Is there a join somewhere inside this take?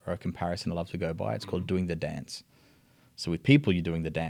no; 0 cuts

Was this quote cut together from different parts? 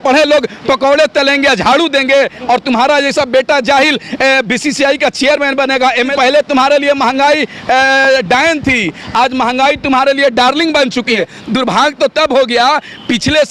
yes; 2 cuts; at 6.1 s, 11.1 s

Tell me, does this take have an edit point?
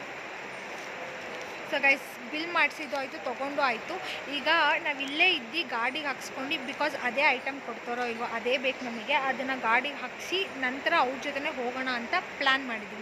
no; 0 cuts

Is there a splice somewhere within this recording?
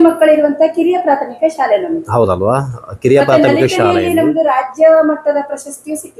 no; 0 cuts

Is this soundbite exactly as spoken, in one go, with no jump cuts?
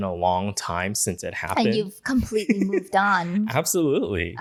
yes; 0 cuts

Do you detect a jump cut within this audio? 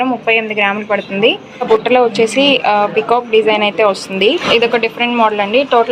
yes; 2 cuts; at 1.6 s, 4.4 s

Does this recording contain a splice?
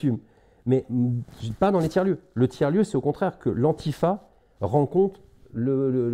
no; 0 cuts

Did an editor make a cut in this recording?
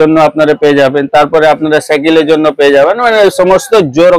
no; 0 cuts

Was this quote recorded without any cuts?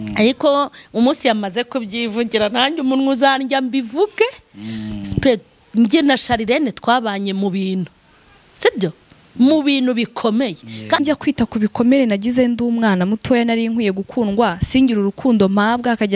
no; 1 cut; at 11.0 s

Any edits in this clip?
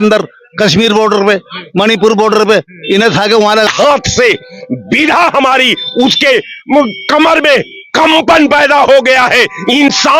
yes; 1 cut; at 3.7 s

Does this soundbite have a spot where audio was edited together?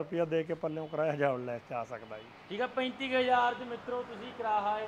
no; 0 cuts

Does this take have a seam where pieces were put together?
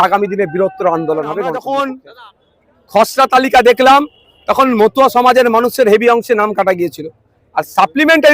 yes; 1 cut; at 1.5 s

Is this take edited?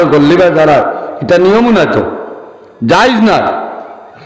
no; 0 cuts

